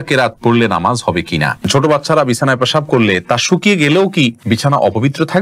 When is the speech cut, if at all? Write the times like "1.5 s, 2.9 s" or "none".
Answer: 1.7 s, 4.4 s